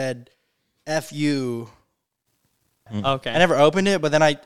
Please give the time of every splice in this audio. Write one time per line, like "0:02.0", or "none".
0:02.9